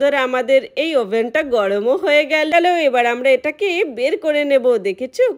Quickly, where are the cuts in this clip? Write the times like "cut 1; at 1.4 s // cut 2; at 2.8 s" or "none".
cut 1; at 2.5 s

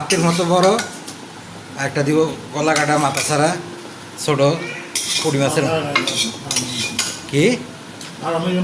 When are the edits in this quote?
none

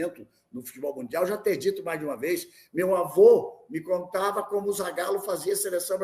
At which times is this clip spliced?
none

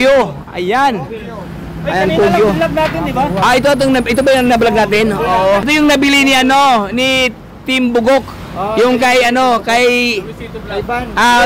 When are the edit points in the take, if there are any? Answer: cut 1; at 5.7 s

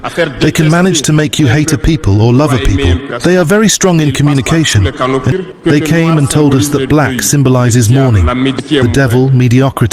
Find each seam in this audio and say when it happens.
cut 1; at 5.3 s

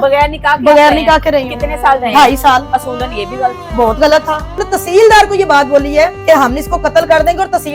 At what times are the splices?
cut 1; at 4.6 s // cut 2; at 6.2 s

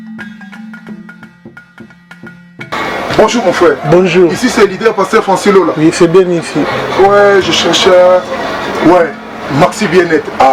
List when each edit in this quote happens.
none

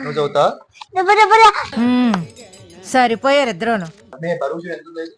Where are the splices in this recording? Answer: cut 1; at 1.6 s // cut 2; at 4.0 s

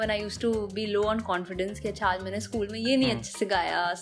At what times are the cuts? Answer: none

